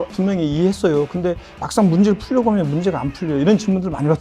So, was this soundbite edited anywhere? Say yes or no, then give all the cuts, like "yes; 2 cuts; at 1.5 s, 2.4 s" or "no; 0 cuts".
no; 0 cuts